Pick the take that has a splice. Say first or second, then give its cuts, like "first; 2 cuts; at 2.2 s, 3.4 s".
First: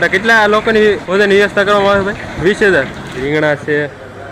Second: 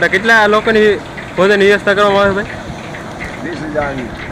first; 3 cuts; at 1.0 s, 2.3 s, 3.2 s